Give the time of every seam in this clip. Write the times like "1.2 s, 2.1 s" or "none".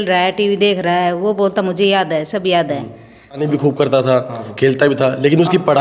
3.4 s